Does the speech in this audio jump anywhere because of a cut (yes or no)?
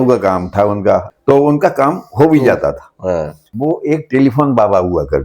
yes